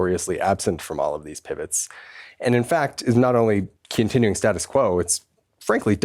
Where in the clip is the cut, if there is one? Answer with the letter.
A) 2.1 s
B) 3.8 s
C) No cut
B